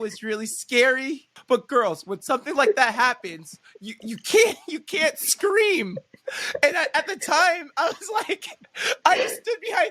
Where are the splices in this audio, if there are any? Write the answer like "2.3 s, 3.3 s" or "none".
1.3 s

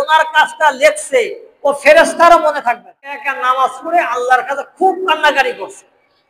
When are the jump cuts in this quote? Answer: 3.3 s

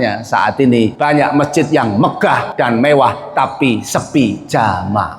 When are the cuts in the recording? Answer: 0.9 s, 2.5 s

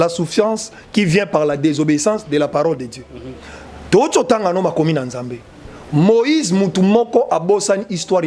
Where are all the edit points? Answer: none

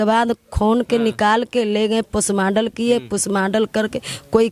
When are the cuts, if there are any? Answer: none

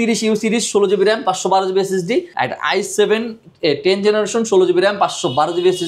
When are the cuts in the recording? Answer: 2.3 s

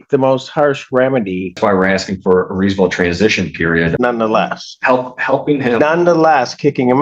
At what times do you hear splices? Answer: 1.6 s, 3.9 s

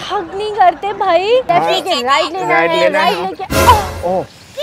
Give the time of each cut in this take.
1.5 s

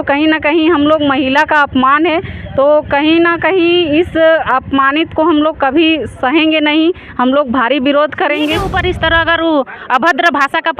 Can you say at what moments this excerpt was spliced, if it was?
8.6 s

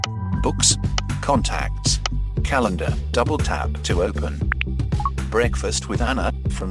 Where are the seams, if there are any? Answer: none

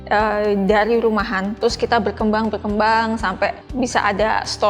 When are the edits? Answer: 1.5 s, 3.6 s

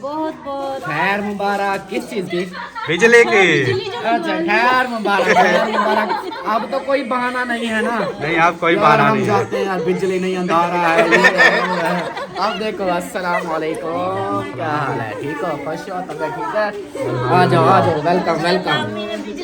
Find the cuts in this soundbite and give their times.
none

